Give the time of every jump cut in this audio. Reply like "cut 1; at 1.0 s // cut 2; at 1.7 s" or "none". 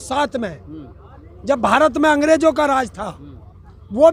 none